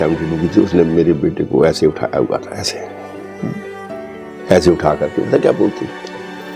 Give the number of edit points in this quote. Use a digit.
0